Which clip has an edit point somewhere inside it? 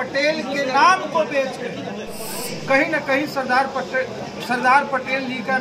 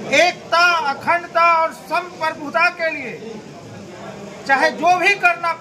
first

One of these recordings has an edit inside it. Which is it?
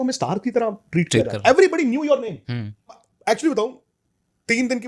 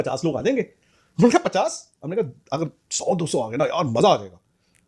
first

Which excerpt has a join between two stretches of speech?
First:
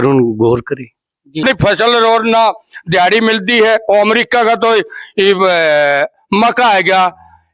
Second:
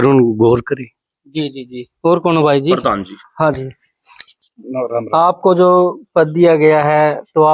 first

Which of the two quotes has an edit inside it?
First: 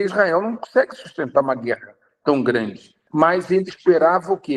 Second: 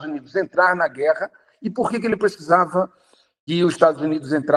first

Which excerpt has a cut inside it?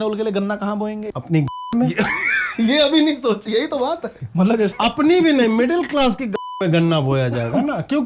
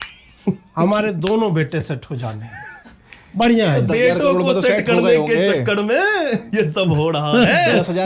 first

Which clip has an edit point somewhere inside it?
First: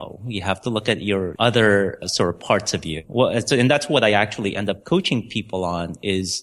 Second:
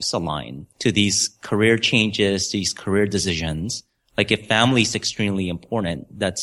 first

